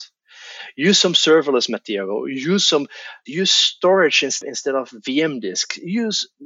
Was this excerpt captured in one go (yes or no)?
no